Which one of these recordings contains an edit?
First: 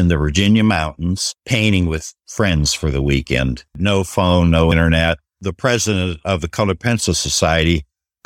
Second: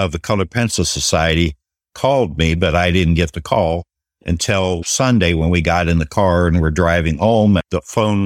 first; 4 cuts; at 1.3 s, 2.2 s, 3.8 s, 5.0 s

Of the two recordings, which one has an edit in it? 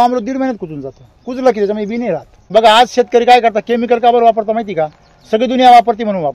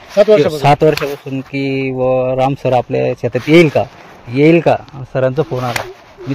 first; 1 cut; at 2.4 s

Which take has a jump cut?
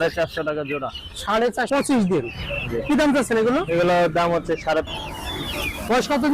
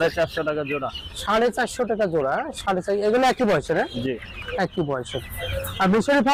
first; 2 cuts; at 1.7 s, 4.9 s

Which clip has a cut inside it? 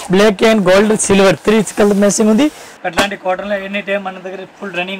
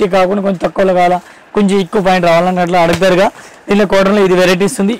first; 1 cut; at 2.7 s

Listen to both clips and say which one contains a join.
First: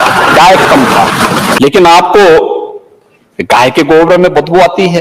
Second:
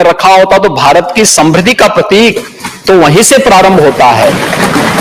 first; 1 cut; at 1.4 s

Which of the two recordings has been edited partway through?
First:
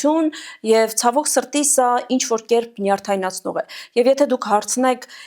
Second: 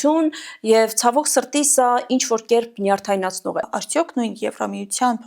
second; 1 cut; at 3.8 s

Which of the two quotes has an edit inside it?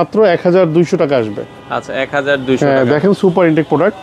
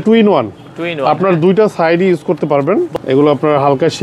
second; 1 cut; at 2.9 s

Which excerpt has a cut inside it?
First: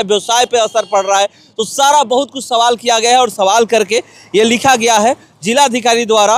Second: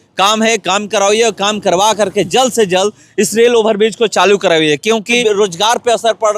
second; 1 cut; at 5.2 s

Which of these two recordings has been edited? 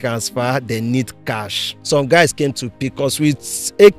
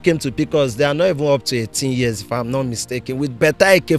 first; 1 cut; at 1.7 s

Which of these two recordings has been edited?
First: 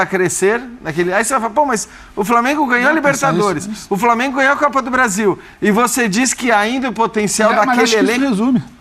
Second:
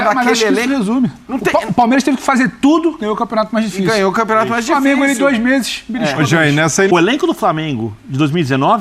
second; 1 cut; at 6.9 s

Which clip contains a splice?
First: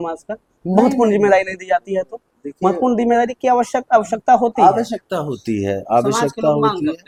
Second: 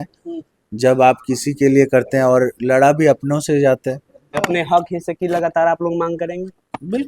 second; 1 cut; at 4.1 s

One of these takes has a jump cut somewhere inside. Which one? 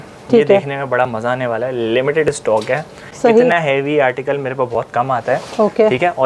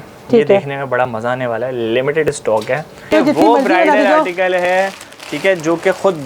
second; 1 cut; at 3.1 s

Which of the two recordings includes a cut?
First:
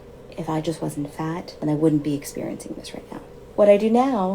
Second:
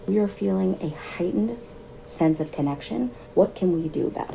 first; 1 cut; at 3.0 s

